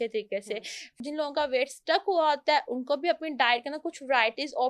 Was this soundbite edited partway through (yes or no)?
yes